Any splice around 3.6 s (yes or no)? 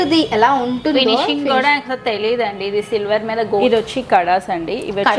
yes